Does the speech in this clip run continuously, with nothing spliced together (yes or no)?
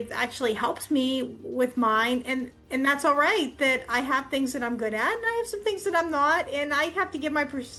yes